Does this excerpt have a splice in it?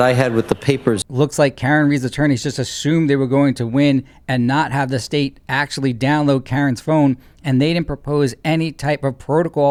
no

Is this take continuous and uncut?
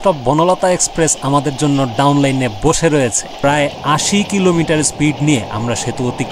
no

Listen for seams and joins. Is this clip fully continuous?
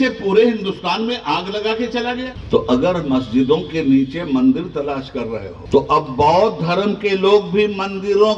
no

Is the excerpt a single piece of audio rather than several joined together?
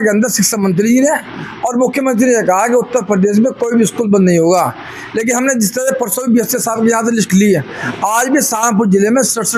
yes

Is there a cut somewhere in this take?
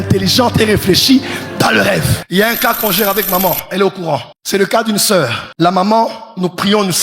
yes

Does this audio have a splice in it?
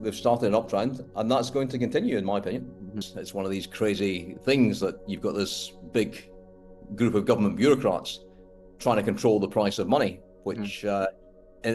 yes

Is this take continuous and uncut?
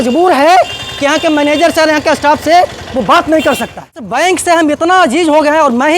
no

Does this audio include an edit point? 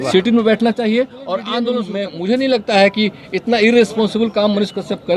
yes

